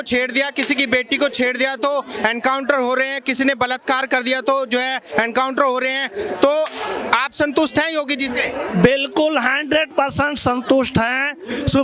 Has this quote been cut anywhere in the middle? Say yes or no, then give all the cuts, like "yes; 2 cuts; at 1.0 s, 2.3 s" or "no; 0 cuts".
no; 0 cuts